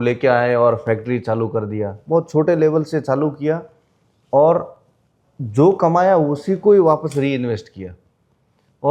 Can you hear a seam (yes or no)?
no